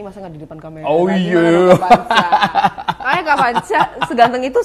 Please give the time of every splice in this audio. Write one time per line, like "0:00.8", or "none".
none